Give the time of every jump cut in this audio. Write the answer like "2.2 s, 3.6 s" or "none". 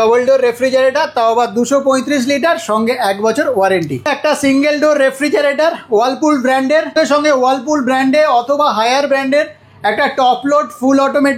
4.1 s, 6.9 s